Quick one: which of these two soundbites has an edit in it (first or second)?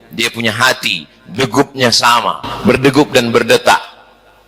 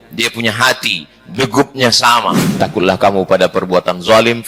second